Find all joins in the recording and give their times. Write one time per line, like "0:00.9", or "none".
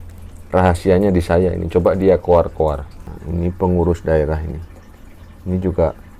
0:02.9